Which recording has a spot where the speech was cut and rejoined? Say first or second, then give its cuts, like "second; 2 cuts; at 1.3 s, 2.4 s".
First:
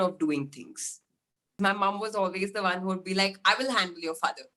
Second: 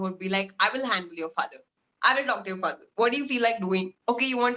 first; 1 cut; at 1.6 s